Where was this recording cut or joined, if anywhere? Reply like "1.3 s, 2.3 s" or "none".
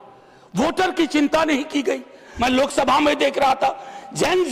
2.2 s